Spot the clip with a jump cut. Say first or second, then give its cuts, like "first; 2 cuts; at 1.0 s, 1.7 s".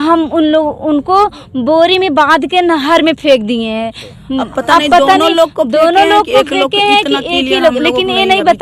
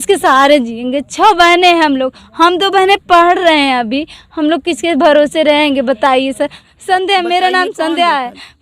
second; 1 cut; at 6.7 s